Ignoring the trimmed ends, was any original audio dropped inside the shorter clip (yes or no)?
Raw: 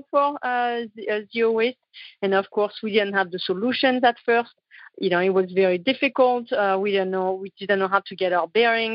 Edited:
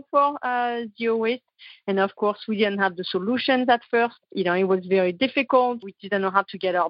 yes